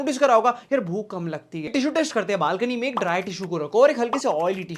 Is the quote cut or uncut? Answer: cut